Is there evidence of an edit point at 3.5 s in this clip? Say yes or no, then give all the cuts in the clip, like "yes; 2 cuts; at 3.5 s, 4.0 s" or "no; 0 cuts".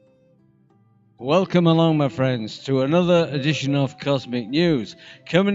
no; 1 cut; at 2.1 s